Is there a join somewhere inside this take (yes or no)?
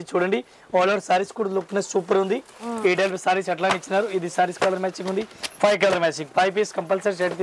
no